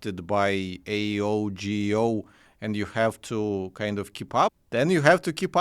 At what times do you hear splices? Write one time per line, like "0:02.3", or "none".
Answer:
0:04.6